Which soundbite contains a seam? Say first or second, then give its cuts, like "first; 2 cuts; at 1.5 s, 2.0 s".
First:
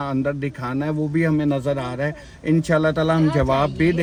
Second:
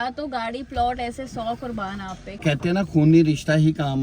second; 1 cut; at 2.4 s